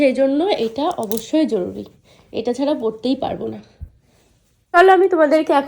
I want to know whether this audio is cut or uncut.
cut